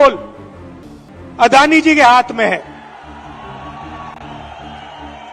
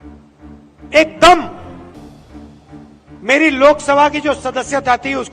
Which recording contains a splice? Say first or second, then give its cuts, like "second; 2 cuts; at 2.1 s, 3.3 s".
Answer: second; 1 cut; at 0.9 s